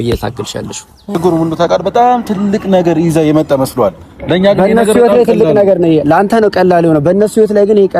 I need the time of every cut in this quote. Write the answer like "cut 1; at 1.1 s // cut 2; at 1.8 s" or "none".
cut 1; at 1.1 s